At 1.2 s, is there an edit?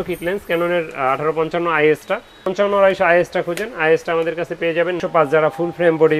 no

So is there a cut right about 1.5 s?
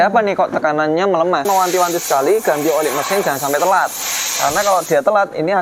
yes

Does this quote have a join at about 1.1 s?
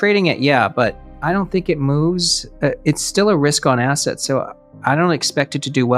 yes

